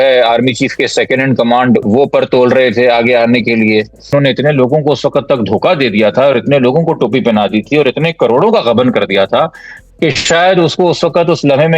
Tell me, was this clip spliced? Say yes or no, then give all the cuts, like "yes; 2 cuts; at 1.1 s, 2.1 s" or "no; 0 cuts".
yes; 2 cuts; at 1.8 s, 4.1 s